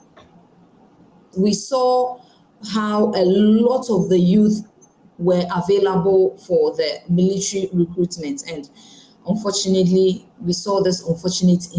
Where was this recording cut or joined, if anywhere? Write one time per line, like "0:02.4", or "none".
0:01.3